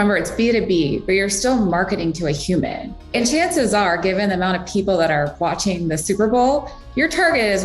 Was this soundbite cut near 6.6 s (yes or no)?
no